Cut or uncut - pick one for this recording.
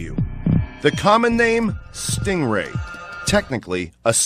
uncut